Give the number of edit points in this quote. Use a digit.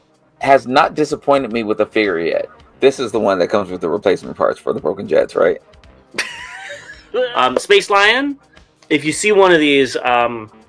2